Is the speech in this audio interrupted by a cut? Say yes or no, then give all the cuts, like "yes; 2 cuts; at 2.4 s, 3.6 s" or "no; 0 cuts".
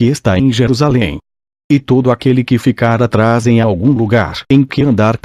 no; 0 cuts